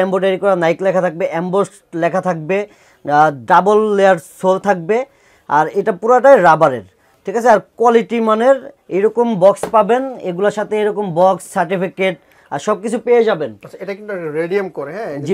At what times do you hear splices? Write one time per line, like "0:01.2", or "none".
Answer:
none